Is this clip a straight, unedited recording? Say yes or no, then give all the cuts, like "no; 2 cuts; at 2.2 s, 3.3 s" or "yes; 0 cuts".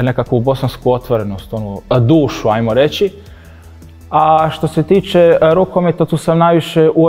yes; 0 cuts